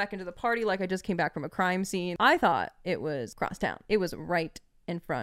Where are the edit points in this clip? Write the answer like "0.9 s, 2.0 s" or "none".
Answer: 2.1 s, 3.7 s